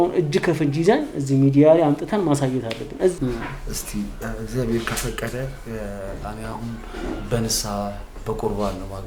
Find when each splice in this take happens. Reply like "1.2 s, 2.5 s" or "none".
3.2 s